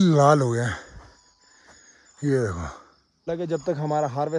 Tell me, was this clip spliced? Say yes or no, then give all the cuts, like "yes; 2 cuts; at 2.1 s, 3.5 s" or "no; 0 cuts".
yes; 1 cut; at 3.3 s